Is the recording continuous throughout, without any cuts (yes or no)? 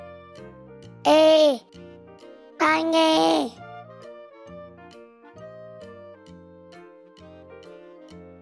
no